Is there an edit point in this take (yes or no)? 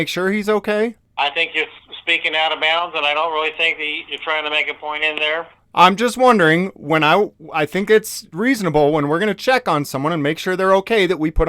yes